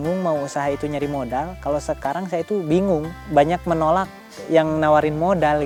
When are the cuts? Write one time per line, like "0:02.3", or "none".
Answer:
none